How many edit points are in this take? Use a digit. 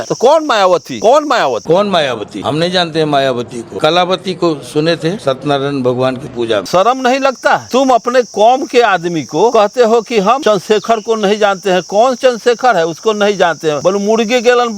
7